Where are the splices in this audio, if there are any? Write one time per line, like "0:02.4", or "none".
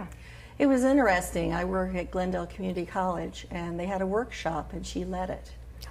none